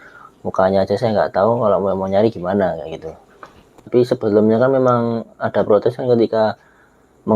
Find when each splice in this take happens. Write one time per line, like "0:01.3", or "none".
0:03.8

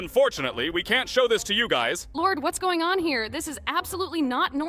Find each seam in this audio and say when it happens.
0:02.0

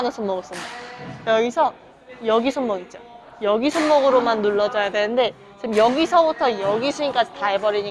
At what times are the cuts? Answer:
none

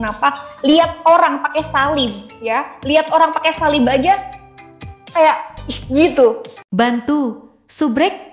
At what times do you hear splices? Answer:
0:06.5

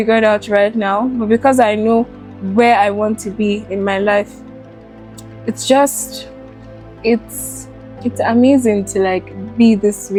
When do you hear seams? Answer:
none

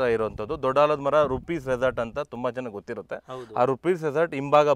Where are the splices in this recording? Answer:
none

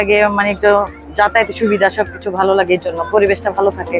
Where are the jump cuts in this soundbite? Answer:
none

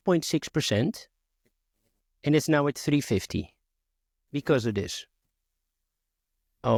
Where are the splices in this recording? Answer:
none

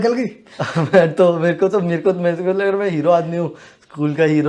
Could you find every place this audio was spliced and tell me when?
none

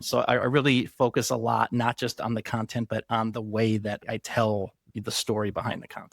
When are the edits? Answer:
0:04.0
0:04.8

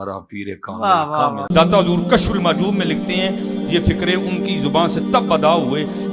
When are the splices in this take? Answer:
0:01.4

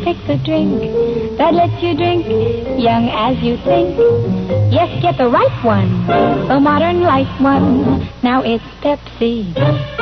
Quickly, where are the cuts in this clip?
0:01.6

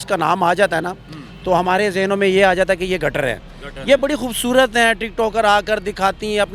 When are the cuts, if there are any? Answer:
none

